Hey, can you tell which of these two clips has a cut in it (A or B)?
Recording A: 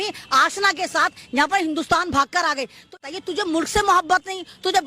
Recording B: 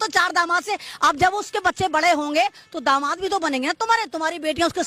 A